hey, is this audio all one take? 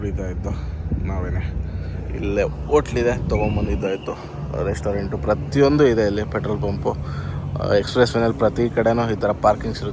yes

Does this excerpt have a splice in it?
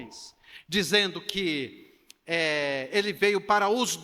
no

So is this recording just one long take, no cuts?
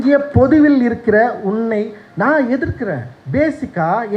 no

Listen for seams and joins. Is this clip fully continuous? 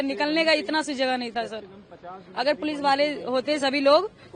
yes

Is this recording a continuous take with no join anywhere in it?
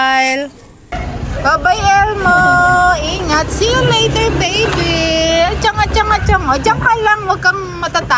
no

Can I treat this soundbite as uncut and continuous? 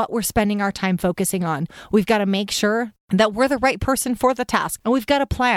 no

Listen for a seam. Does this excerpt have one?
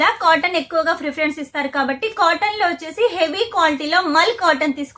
no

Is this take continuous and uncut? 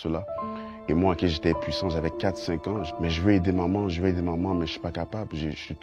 no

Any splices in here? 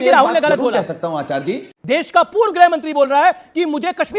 yes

